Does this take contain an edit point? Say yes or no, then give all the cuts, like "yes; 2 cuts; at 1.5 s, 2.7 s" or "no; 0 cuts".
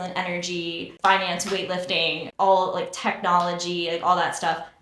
yes; 2 cuts; at 0.9 s, 2.2 s